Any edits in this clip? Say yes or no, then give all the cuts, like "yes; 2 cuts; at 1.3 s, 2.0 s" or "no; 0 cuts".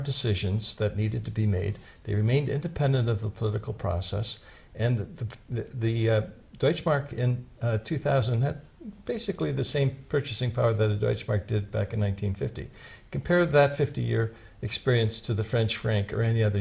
yes; 1 cut; at 5.2 s